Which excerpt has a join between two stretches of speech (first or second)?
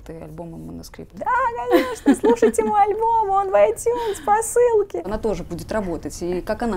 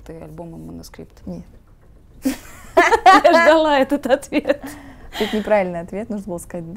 first